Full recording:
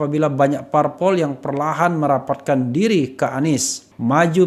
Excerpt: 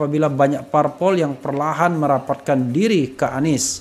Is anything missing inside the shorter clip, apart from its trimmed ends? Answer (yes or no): no